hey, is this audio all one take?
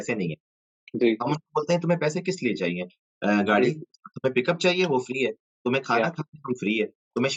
yes; 0 cuts

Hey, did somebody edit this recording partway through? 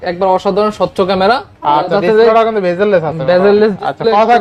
no; 0 cuts

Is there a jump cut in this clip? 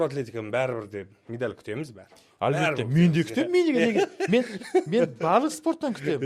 no; 0 cuts

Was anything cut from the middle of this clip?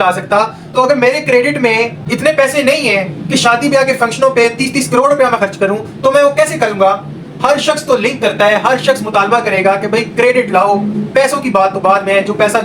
yes; 1 cut; at 2.0 s

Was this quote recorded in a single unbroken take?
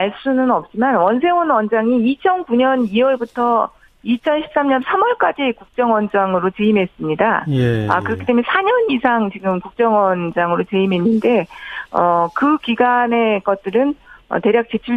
no; 1 cut; at 12.3 s

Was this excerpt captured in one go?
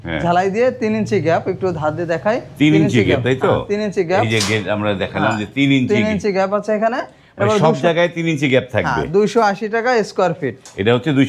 yes; 0 cuts

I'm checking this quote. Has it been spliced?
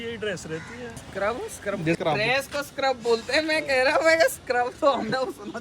yes; 2 cuts; at 1.0 s, 2.0 s

